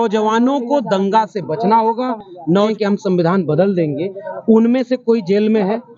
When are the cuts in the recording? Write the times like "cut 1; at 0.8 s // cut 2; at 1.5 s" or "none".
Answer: cut 1; at 2.5 s

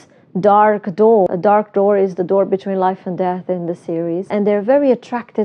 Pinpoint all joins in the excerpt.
cut 1; at 1.3 s // cut 2; at 4.3 s

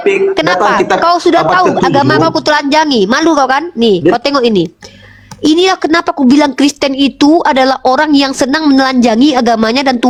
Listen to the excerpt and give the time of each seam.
none

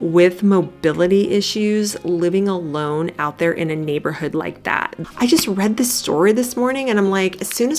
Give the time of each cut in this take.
cut 1; at 5.0 s

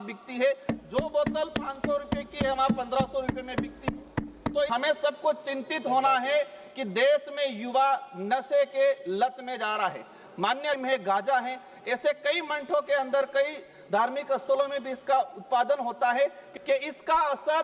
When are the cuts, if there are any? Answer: cut 1; at 4.7 s // cut 2; at 10.8 s // cut 3; at 16.5 s

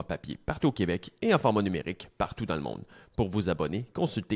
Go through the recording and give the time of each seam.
none

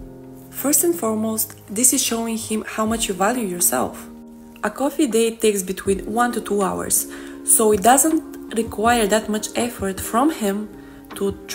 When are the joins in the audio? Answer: none

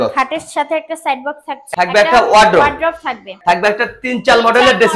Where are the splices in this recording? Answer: cut 1; at 1.7 s // cut 2; at 3.3 s

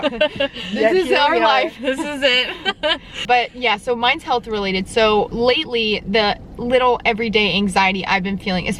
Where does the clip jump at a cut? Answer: none

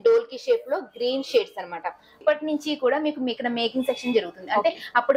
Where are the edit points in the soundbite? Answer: cut 1; at 2.1 s

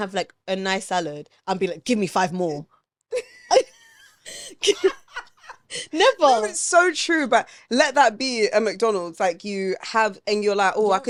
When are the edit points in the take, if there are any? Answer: none

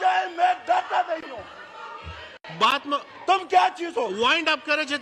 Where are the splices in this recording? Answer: none

